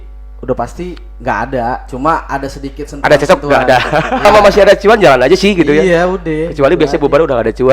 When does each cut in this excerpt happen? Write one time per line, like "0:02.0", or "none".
0:04.2